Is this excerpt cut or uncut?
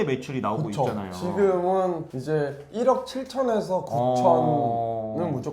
uncut